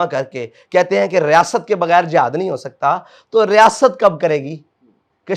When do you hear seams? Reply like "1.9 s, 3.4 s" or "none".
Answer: none